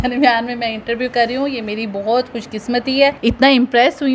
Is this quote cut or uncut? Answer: uncut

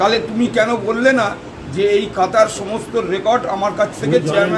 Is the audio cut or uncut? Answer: uncut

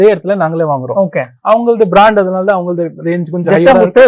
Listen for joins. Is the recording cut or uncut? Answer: uncut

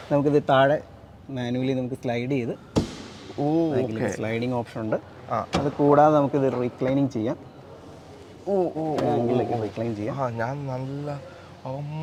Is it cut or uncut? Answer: uncut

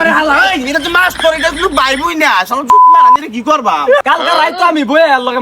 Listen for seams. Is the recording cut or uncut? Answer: cut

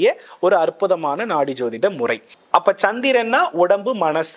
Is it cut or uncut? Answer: cut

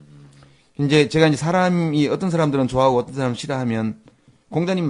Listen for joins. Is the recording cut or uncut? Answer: uncut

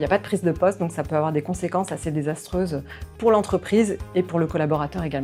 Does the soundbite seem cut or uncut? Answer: uncut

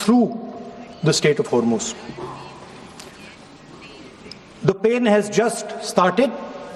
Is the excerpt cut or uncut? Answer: uncut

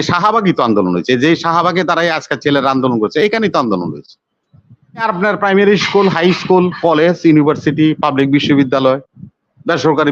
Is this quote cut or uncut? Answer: cut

